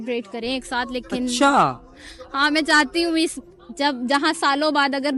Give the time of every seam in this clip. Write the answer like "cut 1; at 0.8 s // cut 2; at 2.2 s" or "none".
none